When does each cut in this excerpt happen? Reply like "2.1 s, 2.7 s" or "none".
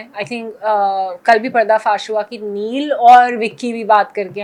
none